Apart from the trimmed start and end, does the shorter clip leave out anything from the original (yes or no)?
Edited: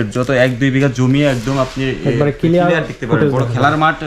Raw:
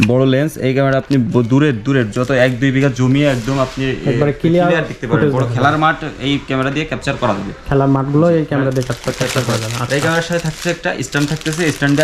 no